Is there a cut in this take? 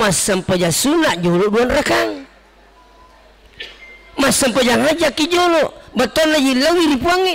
no; 0 cuts

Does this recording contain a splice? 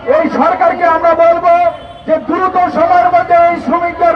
no; 0 cuts

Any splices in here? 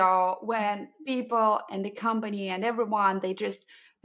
no; 0 cuts

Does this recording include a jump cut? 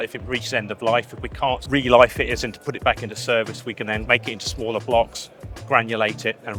yes; 2 cuts; at 1.6 s, 4.0 s

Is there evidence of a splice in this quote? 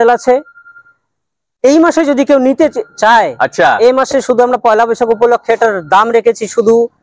no; 0 cuts

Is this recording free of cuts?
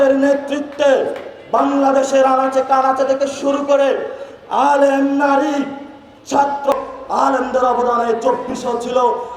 no; 1 cut; at 6.7 s

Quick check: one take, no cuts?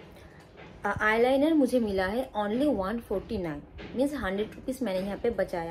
yes; 0 cuts

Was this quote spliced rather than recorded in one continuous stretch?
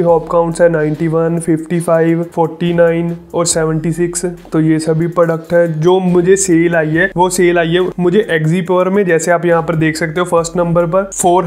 no; 0 cuts

